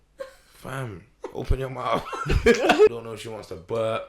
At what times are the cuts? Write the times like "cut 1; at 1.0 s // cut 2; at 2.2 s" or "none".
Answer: cut 1; at 2.9 s